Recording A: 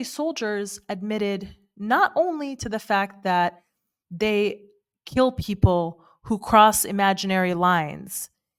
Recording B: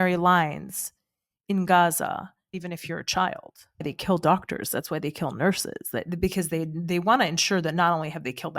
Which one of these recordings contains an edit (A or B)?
B